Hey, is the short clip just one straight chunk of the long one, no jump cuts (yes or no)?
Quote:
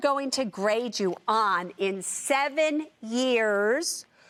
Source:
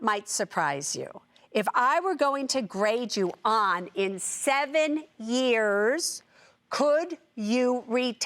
yes